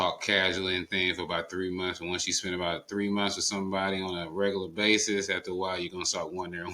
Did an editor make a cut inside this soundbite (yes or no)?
no